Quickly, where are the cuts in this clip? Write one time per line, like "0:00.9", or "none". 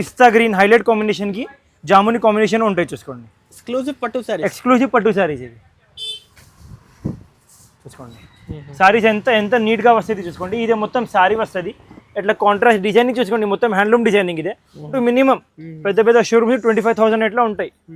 0:14.9